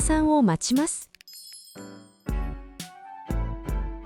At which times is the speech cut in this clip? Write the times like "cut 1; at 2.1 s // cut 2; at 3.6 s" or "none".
none